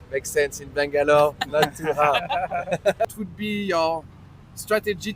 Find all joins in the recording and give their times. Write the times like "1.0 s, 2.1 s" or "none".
3.1 s